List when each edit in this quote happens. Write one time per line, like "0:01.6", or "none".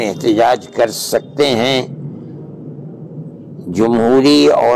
none